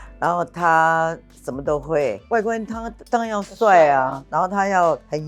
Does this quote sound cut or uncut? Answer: cut